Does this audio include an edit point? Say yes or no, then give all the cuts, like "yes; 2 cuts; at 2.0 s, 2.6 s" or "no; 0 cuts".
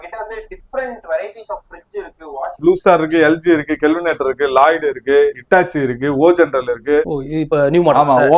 yes; 2 cuts; at 2.5 s, 7.1 s